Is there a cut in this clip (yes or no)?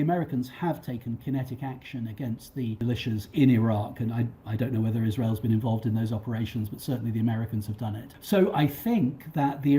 yes